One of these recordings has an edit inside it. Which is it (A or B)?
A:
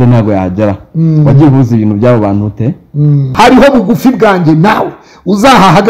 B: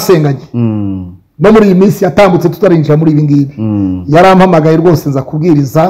A